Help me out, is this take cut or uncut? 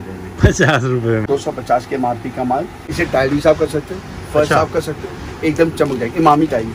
cut